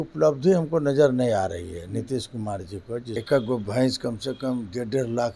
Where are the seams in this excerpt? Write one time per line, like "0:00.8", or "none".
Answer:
0:03.2

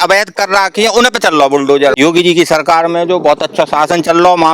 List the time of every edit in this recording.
0:02.0

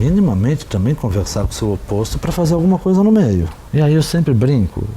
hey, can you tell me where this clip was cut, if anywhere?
0:03.6

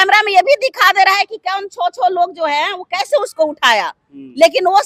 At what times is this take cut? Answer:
none

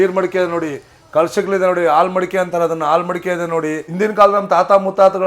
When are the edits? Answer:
0:03.9

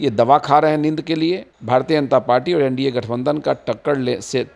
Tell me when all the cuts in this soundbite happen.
0:01.5

